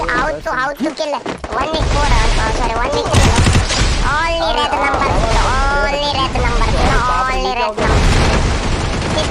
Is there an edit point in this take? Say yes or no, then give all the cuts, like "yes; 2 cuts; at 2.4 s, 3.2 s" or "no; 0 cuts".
yes; 1 cut; at 7.9 s